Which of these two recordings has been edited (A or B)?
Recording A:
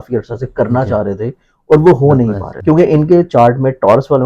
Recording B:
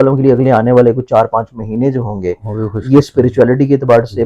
A